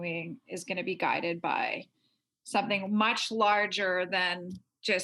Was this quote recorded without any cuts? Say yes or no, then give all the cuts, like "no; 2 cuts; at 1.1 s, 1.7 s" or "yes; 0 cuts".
yes; 0 cuts